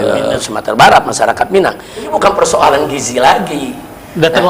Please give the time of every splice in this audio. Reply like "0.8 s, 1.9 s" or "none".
2.1 s